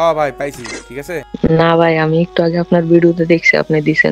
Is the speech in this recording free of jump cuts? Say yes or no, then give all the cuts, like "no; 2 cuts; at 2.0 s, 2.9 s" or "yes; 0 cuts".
no; 1 cut; at 1.3 s